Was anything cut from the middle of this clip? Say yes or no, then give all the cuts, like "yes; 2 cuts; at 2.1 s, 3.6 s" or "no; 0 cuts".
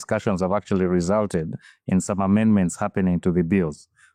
no; 0 cuts